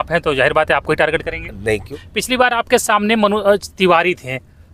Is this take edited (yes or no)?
yes